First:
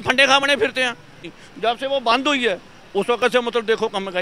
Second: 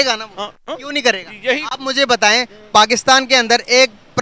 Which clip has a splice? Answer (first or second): first